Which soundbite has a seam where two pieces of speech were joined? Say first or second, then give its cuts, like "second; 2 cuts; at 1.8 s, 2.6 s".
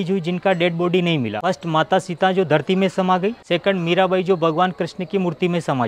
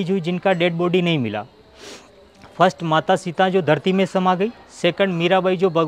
first; 2 cuts; at 1.5 s, 3.4 s